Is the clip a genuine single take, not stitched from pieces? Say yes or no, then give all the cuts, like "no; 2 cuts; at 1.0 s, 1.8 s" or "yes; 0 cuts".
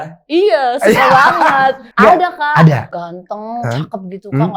no; 2 cuts; at 1.8 s, 2.9 s